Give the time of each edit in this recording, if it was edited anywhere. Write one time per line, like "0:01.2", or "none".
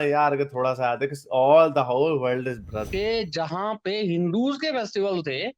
0:02.9